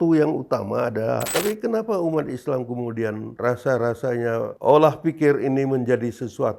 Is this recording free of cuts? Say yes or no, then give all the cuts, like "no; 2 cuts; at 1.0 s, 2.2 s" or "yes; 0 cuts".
no; 1 cut; at 1.3 s